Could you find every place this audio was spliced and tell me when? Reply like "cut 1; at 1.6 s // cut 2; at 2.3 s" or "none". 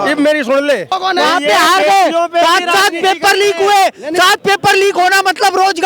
cut 1; at 0.9 s